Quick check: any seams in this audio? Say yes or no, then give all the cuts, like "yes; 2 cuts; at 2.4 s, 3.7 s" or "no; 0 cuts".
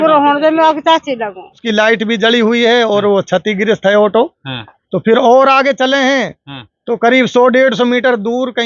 yes; 1 cut; at 1.6 s